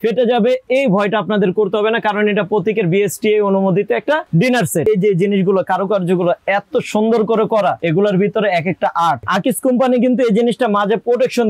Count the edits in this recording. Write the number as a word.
two